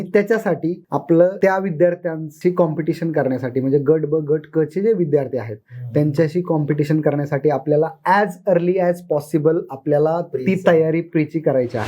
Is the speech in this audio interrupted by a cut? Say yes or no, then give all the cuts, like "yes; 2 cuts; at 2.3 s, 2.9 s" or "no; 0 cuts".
yes; 3 cuts; at 0.9 s, 1.4 s, 2.2 s